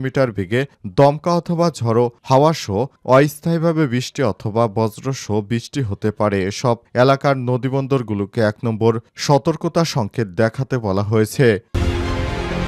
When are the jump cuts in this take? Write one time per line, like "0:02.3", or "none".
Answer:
0:11.7